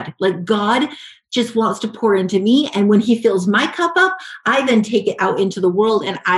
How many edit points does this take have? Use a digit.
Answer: 0